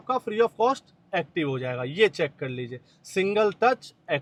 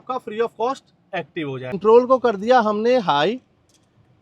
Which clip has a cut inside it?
second; 1 cut; at 1.8 s

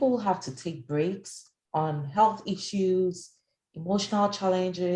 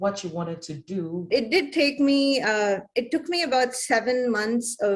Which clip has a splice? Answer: second; 1 cut; at 1.2 s

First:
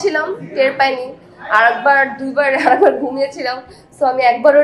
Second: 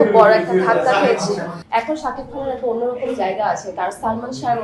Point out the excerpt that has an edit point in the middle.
second; 1 cut; at 1.5 s

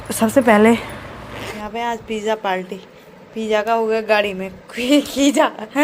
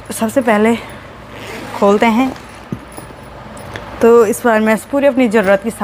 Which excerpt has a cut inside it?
first; 1 cut; at 1.6 s

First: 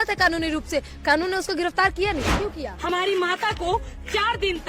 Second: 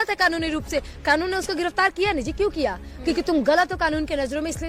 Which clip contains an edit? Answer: first; 1 cut; at 2.6 s

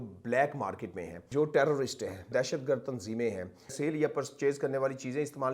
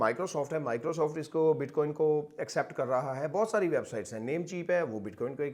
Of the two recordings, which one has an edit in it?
first; 3 cuts; at 1.3 s, 2.3 s, 3.7 s

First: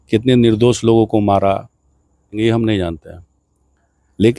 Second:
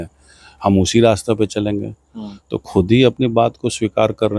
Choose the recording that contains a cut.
first; 1 cut; at 2.4 s

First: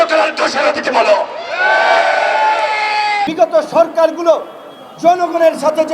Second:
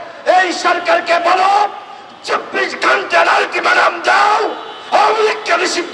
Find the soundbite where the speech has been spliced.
first; 1 cut; at 3.3 s

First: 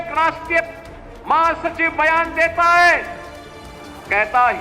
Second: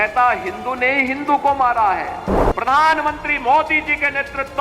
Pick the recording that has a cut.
second; 1 cut; at 2.4 s

